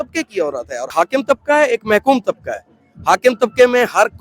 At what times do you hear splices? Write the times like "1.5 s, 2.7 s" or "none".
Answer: 0.9 s